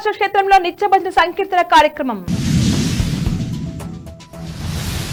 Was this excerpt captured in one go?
yes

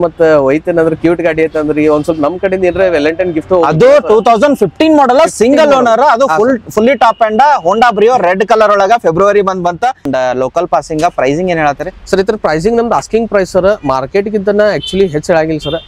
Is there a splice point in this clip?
yes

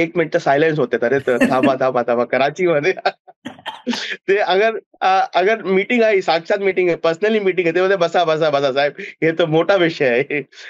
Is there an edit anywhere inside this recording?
no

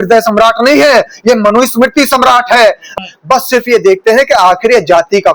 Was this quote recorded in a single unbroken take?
no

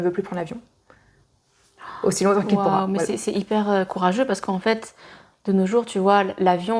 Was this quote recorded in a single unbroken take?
yes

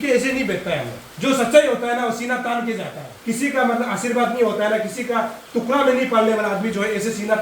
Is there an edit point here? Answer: yes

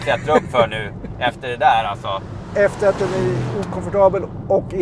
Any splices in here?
no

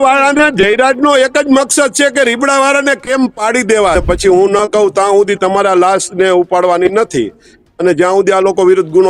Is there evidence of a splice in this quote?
yes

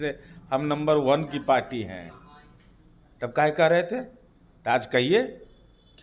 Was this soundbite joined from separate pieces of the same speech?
no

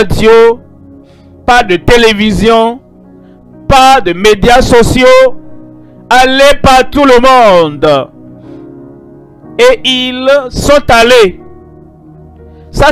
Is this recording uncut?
yes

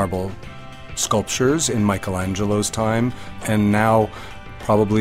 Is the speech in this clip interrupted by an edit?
yes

